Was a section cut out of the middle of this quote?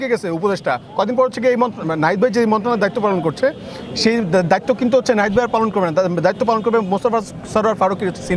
no; 0 cuts

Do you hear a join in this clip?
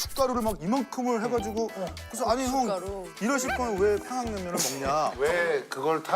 yes; 1 cut; at 5.1 s

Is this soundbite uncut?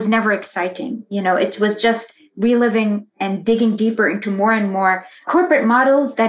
no; 2 cuts; at 3.1 s, 5.3 s

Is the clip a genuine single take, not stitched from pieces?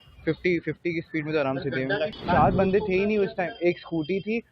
no; 1 cut; at 2.1 s

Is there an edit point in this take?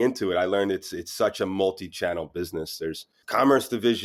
no; 0 cuts

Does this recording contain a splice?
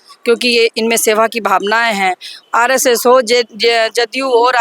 yes; 1 cut; at 2.3 s

